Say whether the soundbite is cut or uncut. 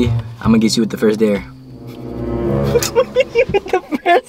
uncut